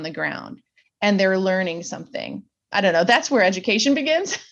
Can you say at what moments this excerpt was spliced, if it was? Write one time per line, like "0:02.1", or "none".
none